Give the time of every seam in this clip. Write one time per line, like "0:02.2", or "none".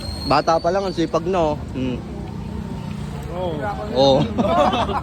none